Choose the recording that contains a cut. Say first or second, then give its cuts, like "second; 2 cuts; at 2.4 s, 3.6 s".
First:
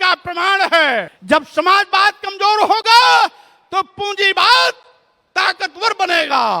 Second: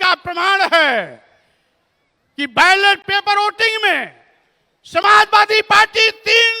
first; 1 cut; at 1.1 s